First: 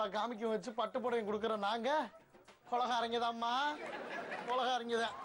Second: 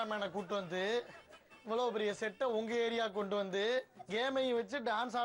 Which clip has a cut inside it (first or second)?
second